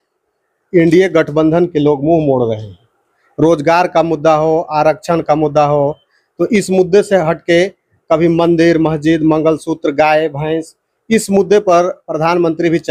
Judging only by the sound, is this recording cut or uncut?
uncut